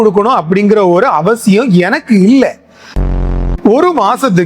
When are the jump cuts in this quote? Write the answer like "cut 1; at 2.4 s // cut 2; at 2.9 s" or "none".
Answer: cut 1; at 3.0 s